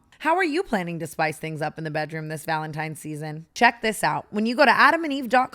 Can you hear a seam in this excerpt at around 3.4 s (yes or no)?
yes